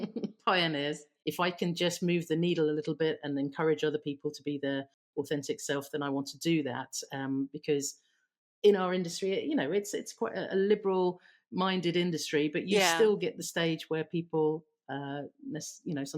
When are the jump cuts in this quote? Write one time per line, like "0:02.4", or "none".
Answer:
0:00.9